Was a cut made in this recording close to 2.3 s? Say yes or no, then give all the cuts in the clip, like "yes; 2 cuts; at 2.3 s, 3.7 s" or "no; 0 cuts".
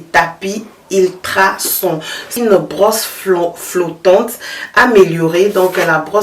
yes; 1 cut; at 2.3 s